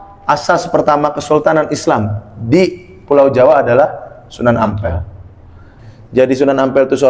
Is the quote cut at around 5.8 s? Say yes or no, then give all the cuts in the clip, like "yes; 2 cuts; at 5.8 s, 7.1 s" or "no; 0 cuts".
yes; 1 cut; at 5.8 s